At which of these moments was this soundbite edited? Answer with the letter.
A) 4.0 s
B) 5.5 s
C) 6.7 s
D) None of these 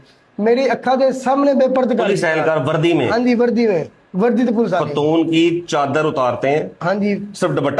A